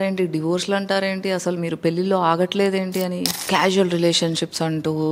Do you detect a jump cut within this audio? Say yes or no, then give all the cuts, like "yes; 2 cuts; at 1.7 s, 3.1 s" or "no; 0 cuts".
yes; 1 cut; at 3.4 s